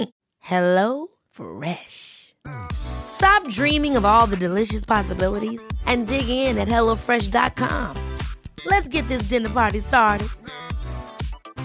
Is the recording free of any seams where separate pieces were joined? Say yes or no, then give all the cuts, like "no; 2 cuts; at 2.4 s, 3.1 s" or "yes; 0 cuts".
yes; 0 cuts